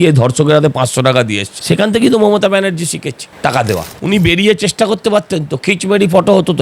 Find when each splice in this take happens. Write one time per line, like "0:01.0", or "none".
0:01.5
0:03.9